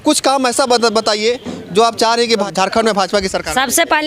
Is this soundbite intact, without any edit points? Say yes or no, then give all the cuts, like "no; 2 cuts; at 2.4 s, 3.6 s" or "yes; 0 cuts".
no; 1 cut; at 2.5 s